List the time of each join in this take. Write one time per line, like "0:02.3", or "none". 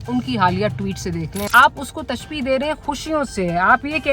0:01.5